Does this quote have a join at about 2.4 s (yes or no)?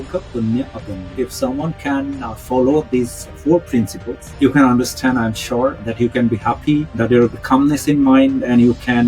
no